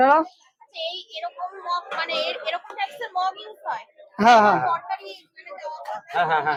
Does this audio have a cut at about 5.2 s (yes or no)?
no